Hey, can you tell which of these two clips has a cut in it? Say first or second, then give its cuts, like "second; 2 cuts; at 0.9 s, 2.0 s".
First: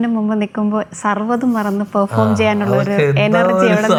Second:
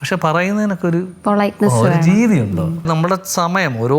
second; 2 cuts; at 1.1 s, 2.9 s